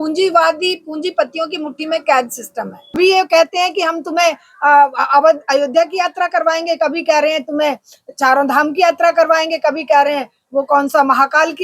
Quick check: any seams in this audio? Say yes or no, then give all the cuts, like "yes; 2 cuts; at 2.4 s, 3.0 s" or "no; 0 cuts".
yes; 1 cut; at 3.0 s